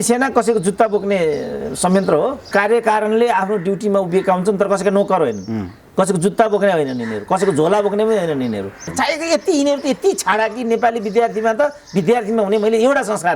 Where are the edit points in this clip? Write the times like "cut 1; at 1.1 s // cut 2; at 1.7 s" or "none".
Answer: cut 1; at 2.5 s // cut 2; at 8.8 s